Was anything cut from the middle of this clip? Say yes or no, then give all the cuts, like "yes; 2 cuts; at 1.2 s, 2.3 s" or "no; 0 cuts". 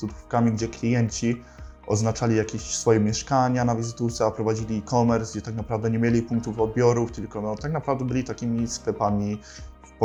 no; 0 cuts